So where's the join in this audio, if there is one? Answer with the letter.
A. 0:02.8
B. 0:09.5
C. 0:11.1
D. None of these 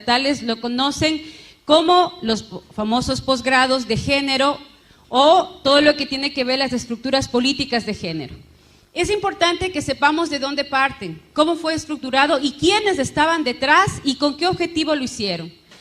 D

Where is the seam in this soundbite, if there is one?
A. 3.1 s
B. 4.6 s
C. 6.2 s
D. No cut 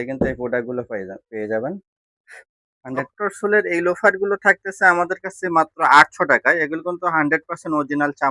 A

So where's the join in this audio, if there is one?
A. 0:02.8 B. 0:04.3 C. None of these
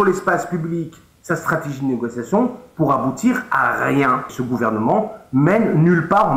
B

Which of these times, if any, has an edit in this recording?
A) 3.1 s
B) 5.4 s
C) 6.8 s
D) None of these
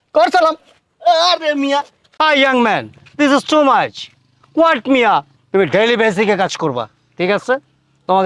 B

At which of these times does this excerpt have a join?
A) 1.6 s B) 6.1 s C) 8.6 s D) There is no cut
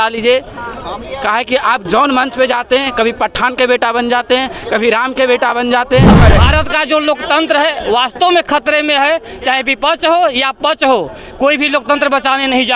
B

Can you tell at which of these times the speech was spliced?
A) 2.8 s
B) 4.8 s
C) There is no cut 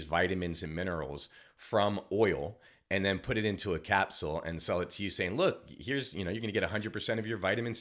C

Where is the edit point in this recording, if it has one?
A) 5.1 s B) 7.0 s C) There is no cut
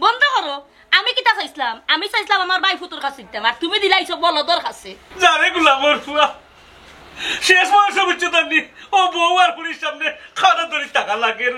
A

